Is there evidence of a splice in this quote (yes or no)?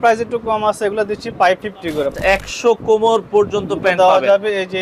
yes